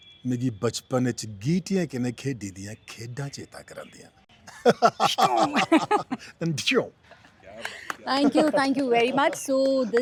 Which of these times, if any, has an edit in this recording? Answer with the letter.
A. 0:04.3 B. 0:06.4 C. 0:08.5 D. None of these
D